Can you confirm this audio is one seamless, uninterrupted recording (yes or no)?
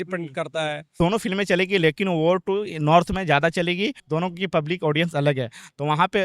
no